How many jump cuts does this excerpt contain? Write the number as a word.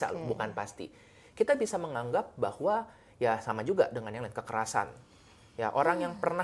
zero